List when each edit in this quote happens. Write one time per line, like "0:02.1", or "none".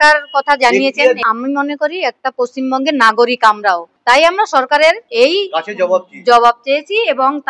0:01.2
0:03.9
0:05.0